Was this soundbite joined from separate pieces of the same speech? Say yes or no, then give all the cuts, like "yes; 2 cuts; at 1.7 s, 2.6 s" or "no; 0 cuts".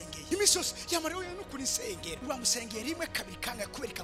no; 0 cuts